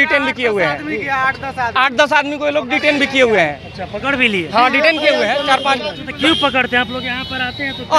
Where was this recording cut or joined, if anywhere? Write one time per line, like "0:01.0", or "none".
none